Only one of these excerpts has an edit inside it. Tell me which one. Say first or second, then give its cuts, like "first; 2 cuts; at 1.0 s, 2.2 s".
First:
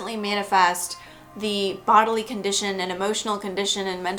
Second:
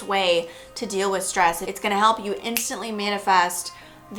second; 1 cut; at 1.7 s